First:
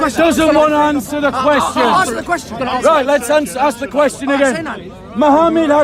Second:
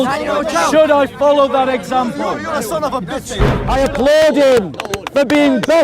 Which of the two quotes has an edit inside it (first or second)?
second